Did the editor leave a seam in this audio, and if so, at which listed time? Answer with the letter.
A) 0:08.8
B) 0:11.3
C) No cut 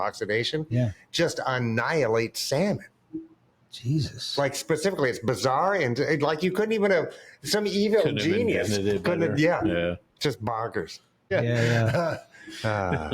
B